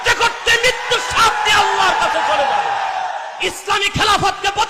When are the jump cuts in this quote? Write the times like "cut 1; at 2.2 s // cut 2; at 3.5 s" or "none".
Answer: cut 1; at 3.3 s

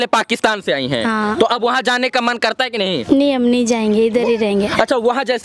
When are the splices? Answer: none

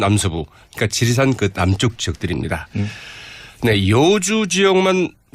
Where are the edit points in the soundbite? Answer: none

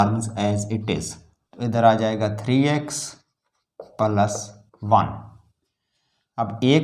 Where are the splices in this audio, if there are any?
none

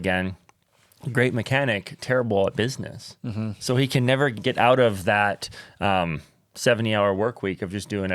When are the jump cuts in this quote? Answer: cut 1; at 4.4 s

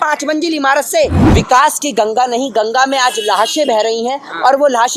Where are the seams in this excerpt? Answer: cut 1; at 1.2 s

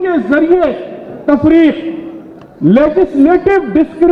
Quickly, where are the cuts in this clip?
none

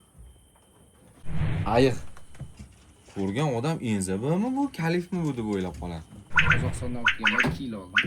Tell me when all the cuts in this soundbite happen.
cut 1; at 1.3 s // cut 2; at 6.3 s

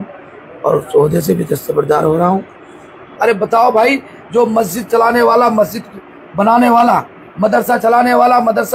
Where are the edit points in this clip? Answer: cut 1; at 3.1 s

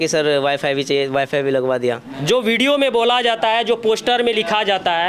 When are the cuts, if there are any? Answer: cut 1; at 2.2 s

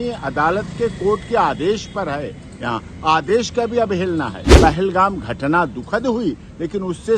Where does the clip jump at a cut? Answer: cut 1; at 4.4 s

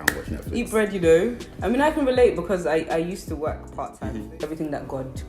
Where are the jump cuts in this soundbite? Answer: cut 1; at 4.1 s

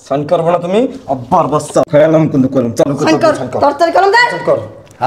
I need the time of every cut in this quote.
cut 1; at 1.9 s

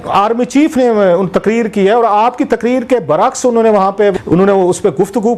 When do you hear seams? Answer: cut 1; at 4.1 s

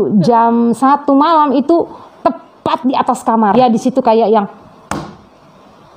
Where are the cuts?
cut 1; at 3.5 s

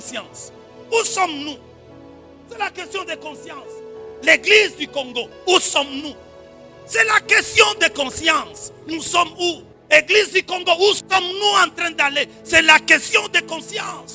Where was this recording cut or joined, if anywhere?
cut 1; at 9.7 s

